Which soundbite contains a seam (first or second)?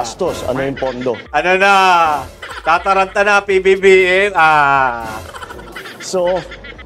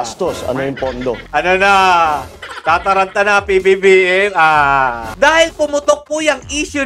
second